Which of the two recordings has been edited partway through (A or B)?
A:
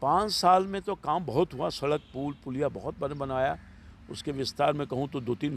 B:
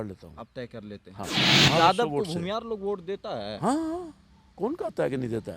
B